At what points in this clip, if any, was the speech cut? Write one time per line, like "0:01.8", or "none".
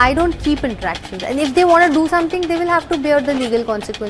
none